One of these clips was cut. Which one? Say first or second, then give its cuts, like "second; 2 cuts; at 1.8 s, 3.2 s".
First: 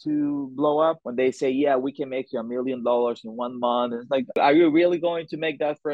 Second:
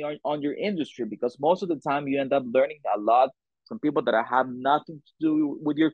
first; 2 cuts; at 1.0 s, 4.4 s